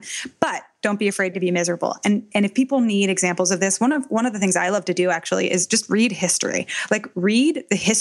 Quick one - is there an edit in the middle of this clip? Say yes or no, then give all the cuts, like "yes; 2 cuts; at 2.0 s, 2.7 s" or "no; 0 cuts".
no; 0 cuts